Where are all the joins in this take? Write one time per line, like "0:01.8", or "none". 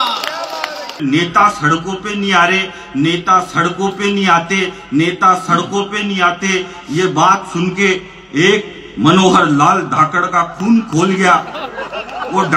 0:01.0